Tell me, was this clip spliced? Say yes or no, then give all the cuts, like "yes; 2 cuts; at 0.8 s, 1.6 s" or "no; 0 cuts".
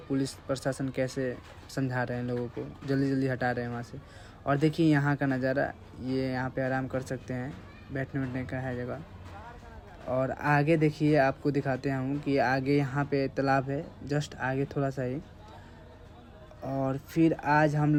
no; 0 cuts